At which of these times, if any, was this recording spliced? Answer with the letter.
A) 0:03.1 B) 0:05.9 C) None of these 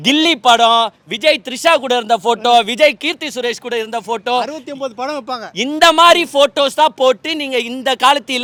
C